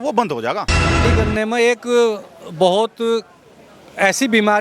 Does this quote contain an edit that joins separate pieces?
yes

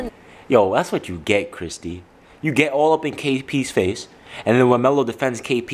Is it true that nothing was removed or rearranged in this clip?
yes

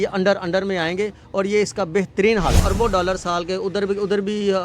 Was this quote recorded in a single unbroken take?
no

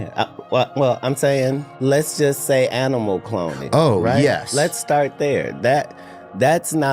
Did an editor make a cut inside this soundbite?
yes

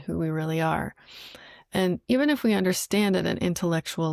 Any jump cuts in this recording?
no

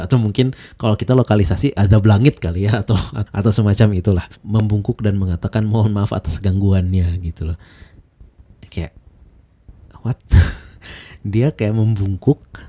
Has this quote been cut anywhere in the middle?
yes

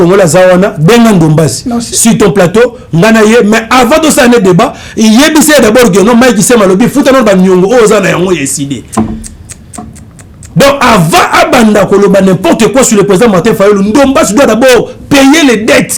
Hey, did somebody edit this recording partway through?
no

